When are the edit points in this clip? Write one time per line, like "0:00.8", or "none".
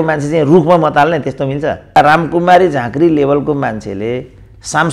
0:02.0